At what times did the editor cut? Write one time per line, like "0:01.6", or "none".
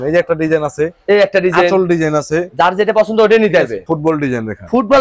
0:03.9